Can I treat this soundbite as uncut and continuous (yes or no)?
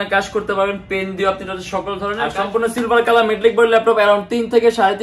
no